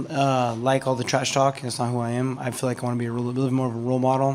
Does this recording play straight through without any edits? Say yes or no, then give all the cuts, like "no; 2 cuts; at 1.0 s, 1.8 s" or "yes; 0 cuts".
yes; 0 cuts